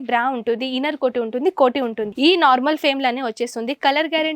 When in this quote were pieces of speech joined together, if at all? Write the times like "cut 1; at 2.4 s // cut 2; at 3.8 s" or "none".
cut 1; at 2.0 s